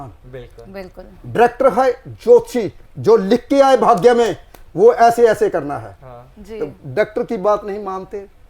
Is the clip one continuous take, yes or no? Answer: yes